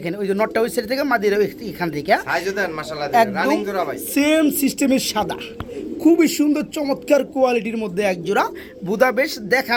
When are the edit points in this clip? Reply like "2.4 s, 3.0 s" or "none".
none